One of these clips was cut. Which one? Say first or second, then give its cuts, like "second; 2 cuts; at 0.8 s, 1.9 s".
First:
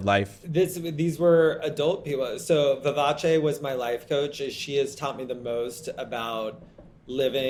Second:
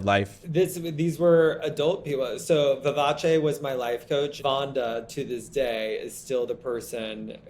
second; 1 cut; at 4.4 s